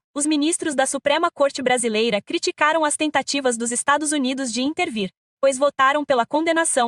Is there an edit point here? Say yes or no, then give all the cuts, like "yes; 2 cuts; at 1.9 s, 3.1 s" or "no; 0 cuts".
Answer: no; 0 cuts